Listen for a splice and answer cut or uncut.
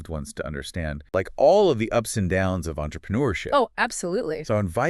cut